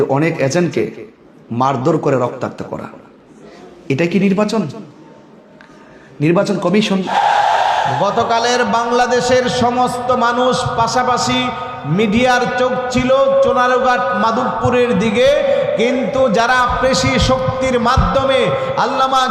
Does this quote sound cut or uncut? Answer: cut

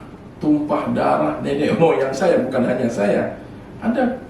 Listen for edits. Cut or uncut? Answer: uncut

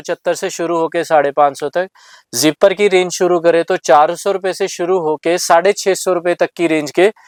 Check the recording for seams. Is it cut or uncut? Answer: uncut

